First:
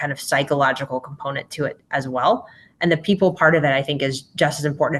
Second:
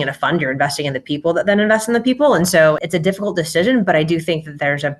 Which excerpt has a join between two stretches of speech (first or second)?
second